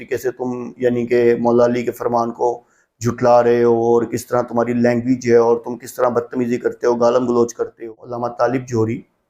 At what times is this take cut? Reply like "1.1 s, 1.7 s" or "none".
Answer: 8.3 s

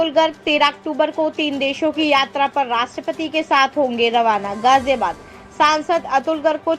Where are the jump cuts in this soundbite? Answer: none

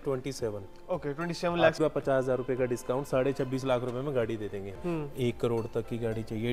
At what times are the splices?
1.8 s, 4.7 s

